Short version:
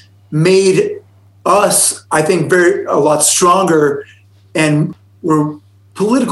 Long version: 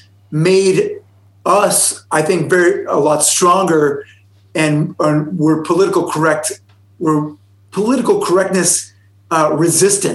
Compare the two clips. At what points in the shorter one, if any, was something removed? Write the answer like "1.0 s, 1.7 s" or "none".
4.9 s